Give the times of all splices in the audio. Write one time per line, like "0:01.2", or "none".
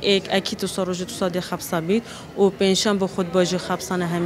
none

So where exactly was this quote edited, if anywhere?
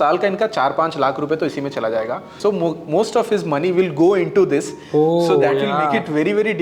0:02.4

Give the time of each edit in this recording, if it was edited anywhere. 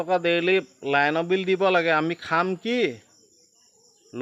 none

